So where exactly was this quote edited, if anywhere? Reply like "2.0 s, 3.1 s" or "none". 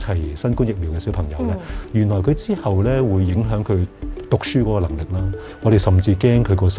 5.5 s